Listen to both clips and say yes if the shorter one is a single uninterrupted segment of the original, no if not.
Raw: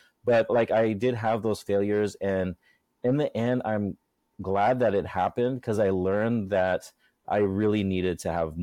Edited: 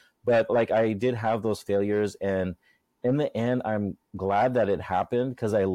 no